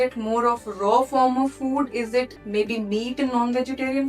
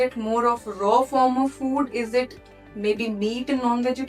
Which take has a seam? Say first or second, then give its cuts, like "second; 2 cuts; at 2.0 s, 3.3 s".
first; 1 cut; at 2.4 s